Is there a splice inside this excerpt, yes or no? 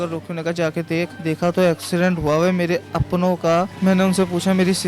no